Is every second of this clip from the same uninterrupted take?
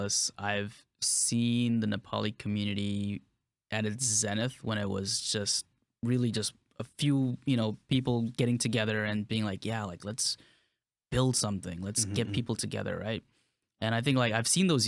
yes; 0 cuts

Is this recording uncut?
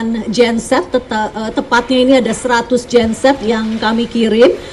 yes; 0 cuts

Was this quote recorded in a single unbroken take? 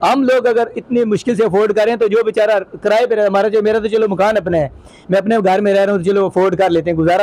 yes; 0 cuts

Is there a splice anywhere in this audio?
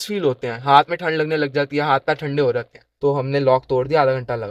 yes; 1 cut; at 2.8 s

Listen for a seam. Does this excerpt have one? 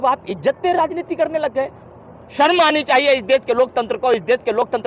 no; 0 cuts

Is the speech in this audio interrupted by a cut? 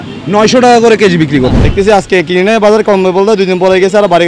yes; 1 cut; at 1.6 s

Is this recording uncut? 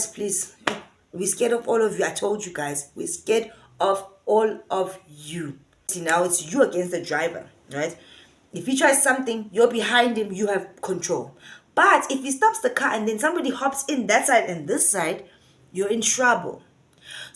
no; 1 cut; at 5.9 s

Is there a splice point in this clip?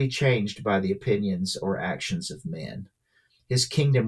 no; 0 cuts

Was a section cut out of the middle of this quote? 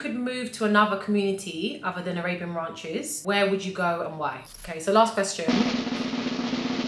yes; 2 cuts; at 3.1 s, 4.6 s

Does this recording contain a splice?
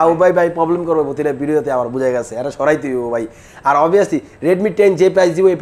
no; 0 cuts

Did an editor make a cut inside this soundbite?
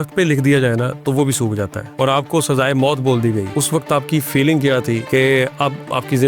yes; 3 cuts; at 1.8 s, 3.5 s, 5.0 s

